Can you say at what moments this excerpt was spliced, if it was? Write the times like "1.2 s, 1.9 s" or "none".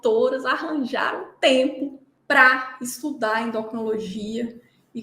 2.1 s